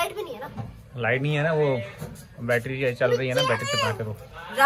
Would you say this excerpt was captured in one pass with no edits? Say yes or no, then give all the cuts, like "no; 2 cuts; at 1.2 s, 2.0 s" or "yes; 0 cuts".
yes; 0 cuts